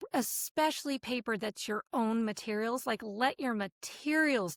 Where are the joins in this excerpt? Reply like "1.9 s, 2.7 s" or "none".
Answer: none